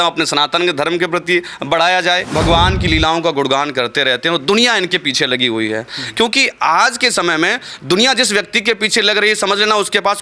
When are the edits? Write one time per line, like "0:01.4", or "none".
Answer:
0:02.2